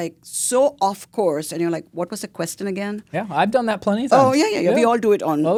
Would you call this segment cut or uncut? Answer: uncut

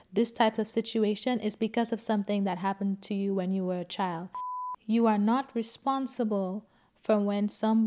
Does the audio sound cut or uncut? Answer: cut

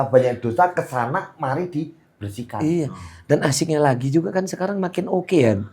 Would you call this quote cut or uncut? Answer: uncut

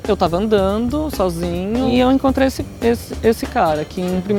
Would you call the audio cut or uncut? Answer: cut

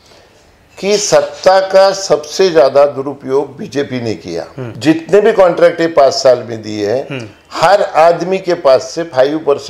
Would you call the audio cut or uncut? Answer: cut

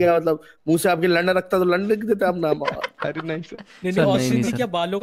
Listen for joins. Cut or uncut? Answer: uncut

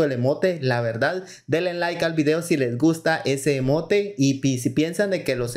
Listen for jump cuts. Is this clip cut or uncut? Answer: uncut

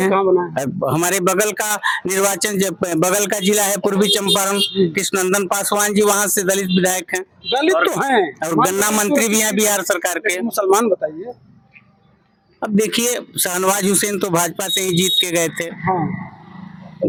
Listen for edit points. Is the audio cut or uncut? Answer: uncut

